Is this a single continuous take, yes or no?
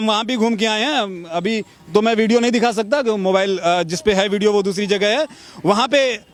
yes